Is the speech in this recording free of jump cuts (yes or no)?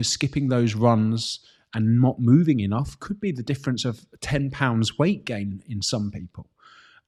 yes